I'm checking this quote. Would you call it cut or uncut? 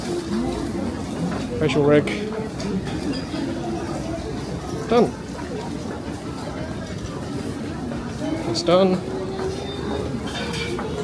uncut